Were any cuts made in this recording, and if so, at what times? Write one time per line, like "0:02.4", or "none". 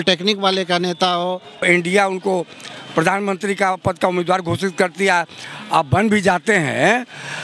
0:01.7